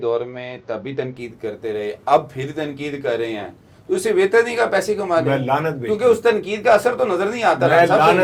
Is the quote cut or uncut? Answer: uncut